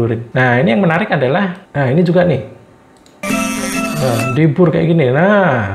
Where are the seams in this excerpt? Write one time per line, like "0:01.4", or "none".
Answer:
0:01.6